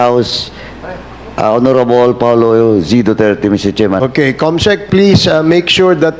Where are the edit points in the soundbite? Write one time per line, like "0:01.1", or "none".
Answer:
0:04.0